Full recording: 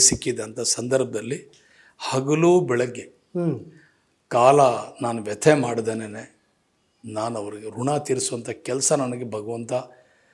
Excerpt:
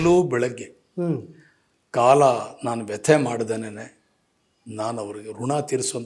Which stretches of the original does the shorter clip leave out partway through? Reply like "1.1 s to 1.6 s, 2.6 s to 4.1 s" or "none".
none